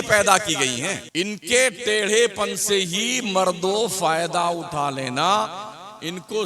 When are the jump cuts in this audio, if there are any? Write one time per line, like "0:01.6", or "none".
0:01.0